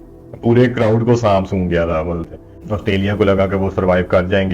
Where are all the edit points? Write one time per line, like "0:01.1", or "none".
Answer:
0:02.2